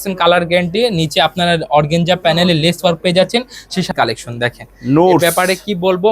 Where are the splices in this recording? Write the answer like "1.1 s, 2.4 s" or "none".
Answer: 3.9 s